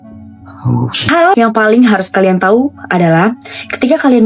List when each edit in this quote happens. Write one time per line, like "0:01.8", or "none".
0:01.0